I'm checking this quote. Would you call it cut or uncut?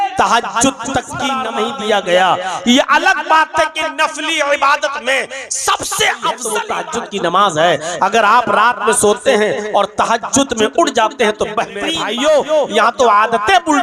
cut